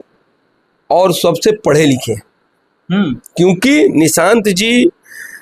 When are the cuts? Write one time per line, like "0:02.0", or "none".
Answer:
none